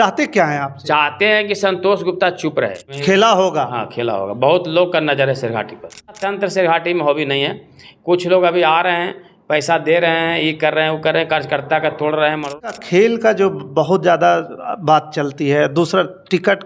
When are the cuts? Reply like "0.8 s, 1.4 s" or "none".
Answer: 2.9 s, 6.2 s, 12.6 s